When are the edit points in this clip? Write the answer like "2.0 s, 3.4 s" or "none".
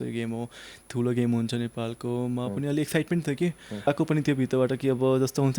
3.9 s